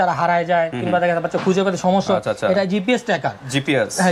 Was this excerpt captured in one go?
yes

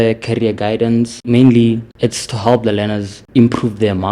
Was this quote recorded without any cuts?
no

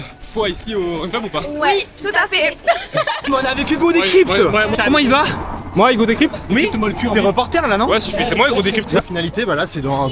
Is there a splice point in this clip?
yes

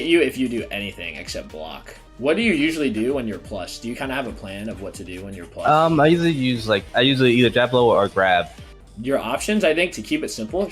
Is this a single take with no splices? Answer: no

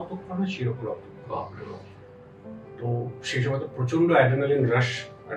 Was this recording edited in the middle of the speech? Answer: no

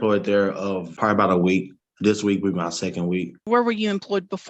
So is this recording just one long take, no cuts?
no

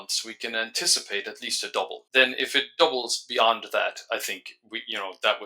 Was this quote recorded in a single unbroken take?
no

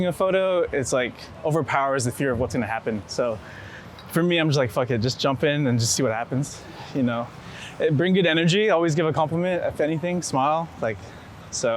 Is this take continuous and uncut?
yes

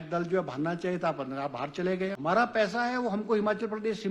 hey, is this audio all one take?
no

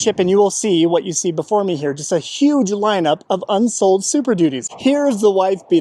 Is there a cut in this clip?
yes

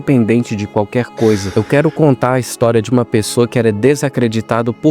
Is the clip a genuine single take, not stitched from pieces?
no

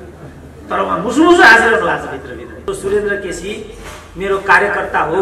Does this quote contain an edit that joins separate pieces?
yes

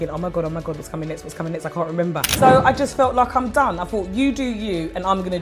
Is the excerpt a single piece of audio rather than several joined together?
no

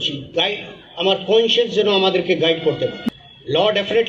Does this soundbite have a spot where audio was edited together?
yes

